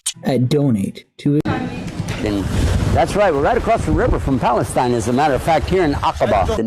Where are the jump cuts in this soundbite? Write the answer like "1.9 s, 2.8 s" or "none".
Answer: 1.5 s